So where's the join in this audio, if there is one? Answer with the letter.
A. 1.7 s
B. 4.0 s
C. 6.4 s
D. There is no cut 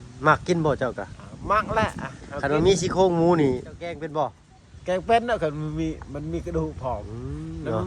B